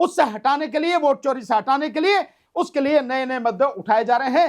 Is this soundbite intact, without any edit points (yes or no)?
no